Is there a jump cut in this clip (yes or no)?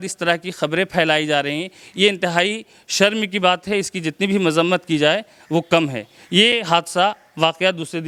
no